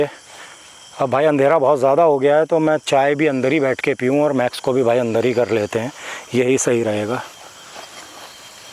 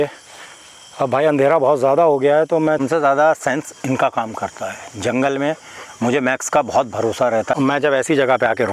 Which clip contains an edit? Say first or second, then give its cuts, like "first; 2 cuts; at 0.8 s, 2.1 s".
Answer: second; 2 cuts; at 2.8 s, 7.5 s